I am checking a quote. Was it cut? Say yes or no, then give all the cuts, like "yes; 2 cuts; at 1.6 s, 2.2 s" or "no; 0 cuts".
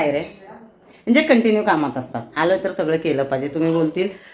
no; 0 cuts